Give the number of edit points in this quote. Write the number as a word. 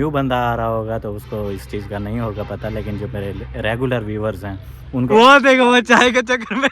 one